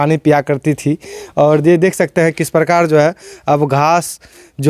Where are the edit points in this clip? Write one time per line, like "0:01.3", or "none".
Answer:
none